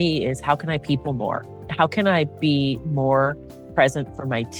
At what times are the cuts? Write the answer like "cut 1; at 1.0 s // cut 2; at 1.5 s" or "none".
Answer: none